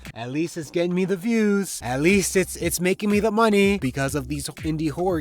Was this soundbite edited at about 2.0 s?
no; 1 cut; at 3.8 s

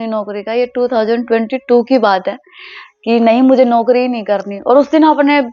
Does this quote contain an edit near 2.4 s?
no; 0 cuts

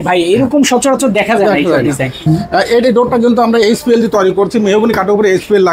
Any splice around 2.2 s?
yes; 1 cut; at 2.2 s

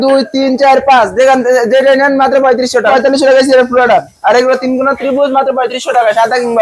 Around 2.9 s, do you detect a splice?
yes; 1 cut; at 2.9 s

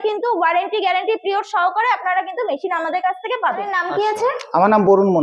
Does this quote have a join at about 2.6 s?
no; 1 cut; at 3.8 s

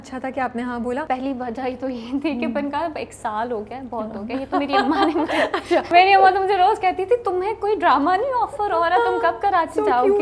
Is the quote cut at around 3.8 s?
no; 2 cuts; at 1.0 s, 5.9 s

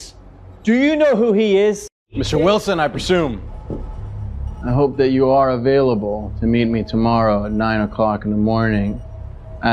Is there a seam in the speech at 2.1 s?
yes; 1 cut; at 2.1 s

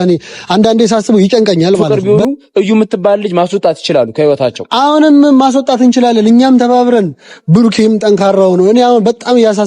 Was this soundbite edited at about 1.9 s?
yes; 1 cut; at 1.9 s

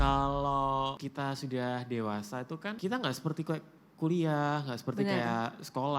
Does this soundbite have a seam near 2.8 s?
yes; 2 cuts; at 1.0 s, 2.8 s

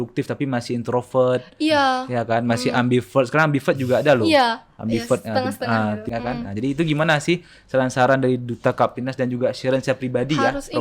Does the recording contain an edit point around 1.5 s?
no; 1 cut; at 6.1 s

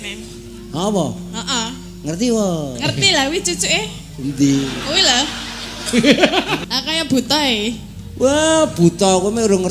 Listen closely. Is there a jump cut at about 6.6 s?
yes; 1 cut; at 6.6 s

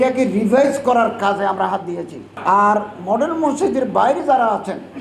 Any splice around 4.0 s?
no; 1 cut; at 2.3 s

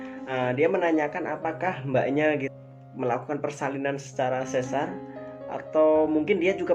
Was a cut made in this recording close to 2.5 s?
yes; 1 cut; at 2.5 s

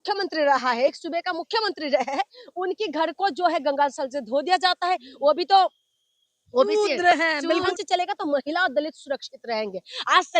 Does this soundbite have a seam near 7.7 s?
yes; 1 cut; at 7.7 s

